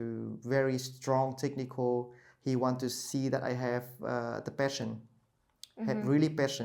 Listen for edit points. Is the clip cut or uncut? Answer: uncut